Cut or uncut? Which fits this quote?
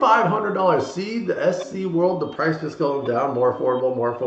uncut